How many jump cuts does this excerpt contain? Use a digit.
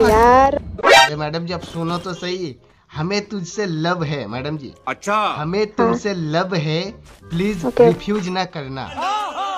1